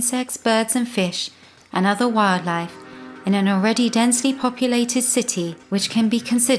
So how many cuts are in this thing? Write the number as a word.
one